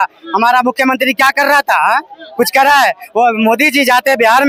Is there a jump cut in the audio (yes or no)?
no